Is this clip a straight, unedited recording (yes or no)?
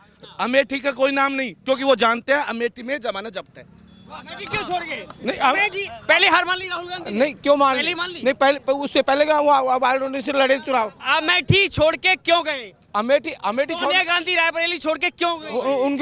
yes